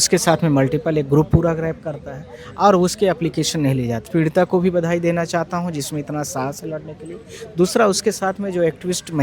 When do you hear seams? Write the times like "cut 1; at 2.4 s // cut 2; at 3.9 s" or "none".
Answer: cut 1; at 4.1 s